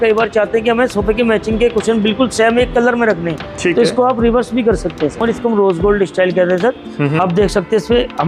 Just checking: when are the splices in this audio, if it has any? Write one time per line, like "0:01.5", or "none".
0:05.2